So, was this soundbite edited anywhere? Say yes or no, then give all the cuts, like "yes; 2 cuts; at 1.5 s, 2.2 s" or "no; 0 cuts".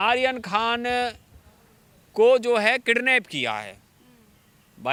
no; 0 cuts